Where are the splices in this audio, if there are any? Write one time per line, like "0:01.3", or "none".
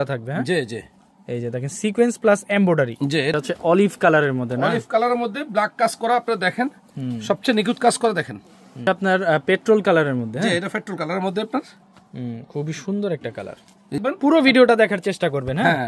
0:03.3
0:08.9
0:14.0